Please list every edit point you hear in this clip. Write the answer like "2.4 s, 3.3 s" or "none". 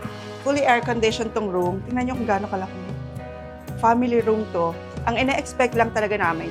none